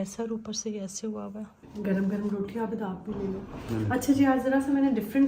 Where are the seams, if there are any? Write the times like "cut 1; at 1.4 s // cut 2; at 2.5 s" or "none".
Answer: cut 1; at 1.6 s